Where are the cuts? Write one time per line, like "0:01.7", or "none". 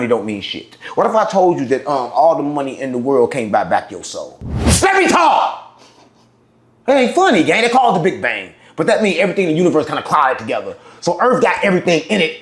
0:04.5

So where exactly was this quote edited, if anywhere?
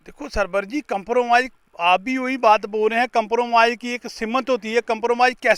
none

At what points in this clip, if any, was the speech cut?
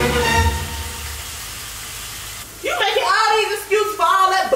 0:02.4

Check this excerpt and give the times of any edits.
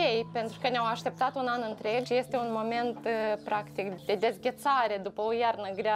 0:02.1
0:03.9

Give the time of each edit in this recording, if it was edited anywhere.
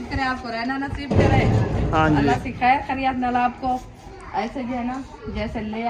0:01.7

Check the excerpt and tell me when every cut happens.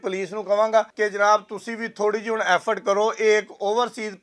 0:00.9

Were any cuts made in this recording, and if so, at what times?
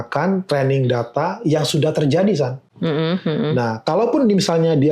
none

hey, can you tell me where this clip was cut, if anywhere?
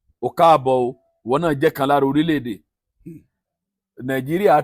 none

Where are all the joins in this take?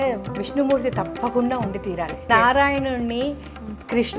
0:02.2

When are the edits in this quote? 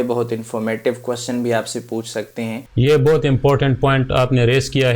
0:02.6

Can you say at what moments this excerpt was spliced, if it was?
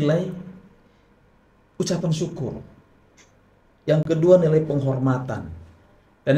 none

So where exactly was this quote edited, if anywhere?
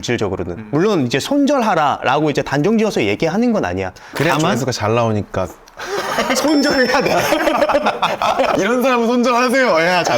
0:08.5

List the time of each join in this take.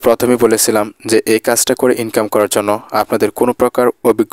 none

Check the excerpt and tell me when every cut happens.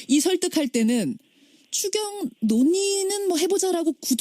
0:01.0

